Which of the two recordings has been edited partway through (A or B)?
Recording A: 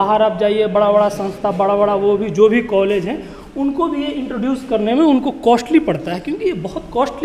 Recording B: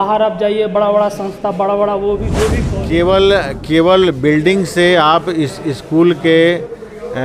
B